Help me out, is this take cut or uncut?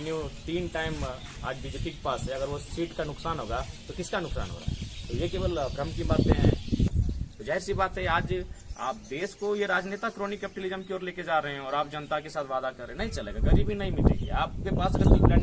cut